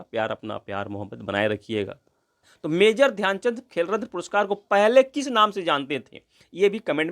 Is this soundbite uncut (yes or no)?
no